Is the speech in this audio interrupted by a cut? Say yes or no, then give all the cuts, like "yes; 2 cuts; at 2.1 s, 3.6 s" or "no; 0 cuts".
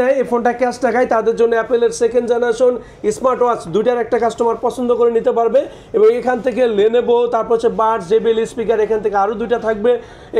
no; 0 cuts